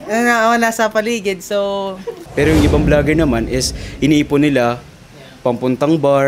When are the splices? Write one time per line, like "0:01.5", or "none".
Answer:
0:02.3

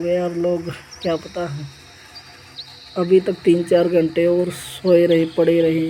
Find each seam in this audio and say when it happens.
none

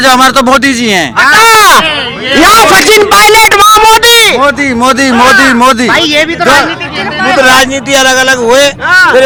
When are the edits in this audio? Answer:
none

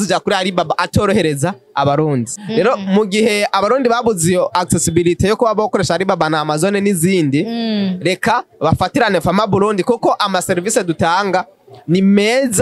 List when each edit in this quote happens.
0:02.3

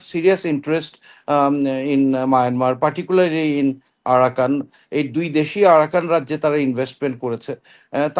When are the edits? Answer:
none

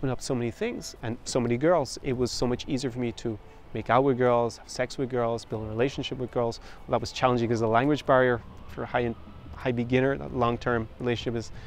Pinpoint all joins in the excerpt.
0:00.9

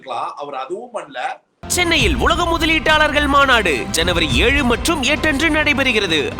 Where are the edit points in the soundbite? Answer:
0:01.5

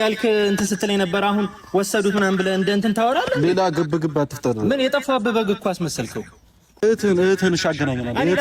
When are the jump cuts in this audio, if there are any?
0:06.8

